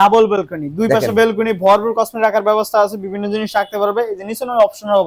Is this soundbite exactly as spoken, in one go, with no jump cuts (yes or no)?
yes